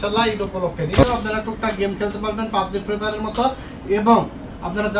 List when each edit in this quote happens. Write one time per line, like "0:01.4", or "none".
0:01.0